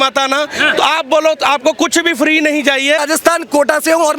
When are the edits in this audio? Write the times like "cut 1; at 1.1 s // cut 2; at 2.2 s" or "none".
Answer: cut 1; at 3.0 s